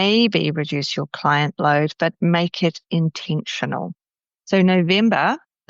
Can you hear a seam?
yes; 1 cut; at 4.3 s

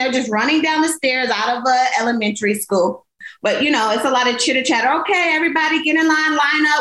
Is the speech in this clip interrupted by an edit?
yes; 1 cut; at 3.2 s

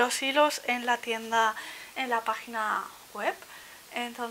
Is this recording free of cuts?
yes; 0 cuts

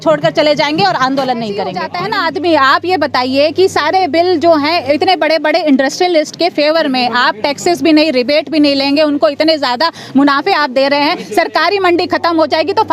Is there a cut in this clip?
yes; 1 cut; at 1.9 s

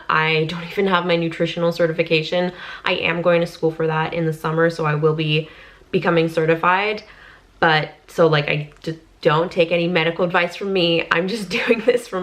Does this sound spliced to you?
no; 0 cuts

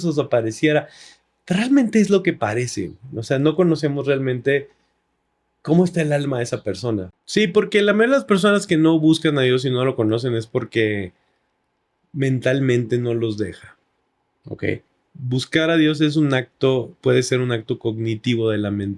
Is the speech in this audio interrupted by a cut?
yes; 1 cut; at 7.2 s

